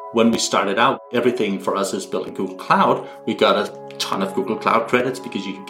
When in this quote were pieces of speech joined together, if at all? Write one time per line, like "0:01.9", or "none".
0:01.0